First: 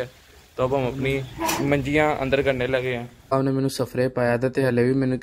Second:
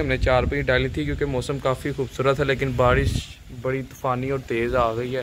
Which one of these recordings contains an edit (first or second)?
first